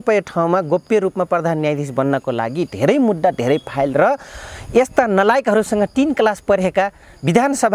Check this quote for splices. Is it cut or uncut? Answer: uncut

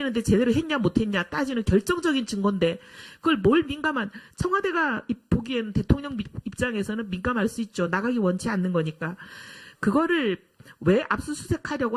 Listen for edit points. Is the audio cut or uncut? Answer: cut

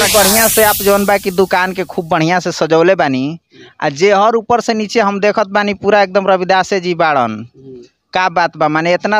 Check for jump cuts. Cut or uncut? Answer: uncut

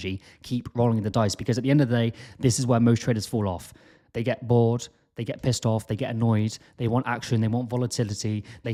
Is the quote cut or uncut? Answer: uncut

